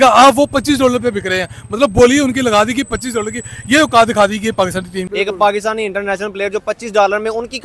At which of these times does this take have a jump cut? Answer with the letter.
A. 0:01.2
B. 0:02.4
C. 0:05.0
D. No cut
C